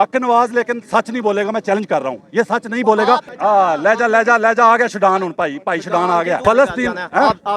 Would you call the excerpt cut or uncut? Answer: cut